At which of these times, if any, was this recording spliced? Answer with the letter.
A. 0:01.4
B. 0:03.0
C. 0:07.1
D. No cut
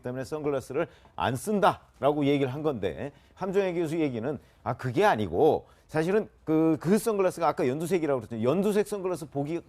A